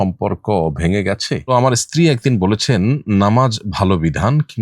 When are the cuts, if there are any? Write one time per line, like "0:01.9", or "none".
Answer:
0:01.4